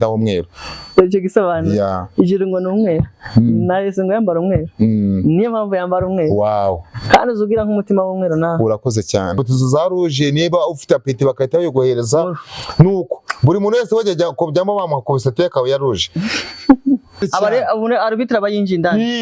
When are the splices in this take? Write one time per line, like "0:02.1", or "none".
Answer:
0:09.4
0:17.2